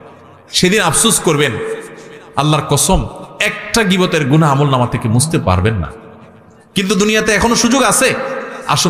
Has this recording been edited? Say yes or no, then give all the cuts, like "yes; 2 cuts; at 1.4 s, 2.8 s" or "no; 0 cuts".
no; 0 cuts